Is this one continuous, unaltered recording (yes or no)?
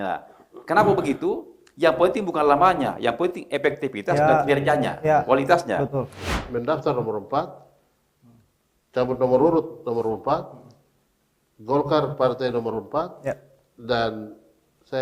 no